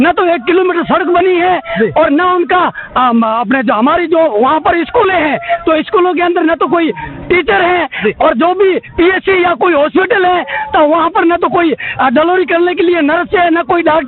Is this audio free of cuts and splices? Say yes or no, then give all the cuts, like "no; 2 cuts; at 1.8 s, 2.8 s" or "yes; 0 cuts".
yes; 0 cuts